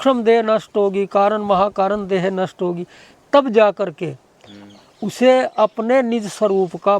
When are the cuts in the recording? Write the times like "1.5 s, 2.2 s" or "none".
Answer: none